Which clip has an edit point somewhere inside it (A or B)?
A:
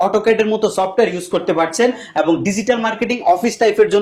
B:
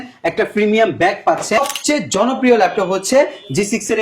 B